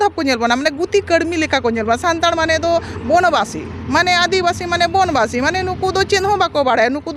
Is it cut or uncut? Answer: uncut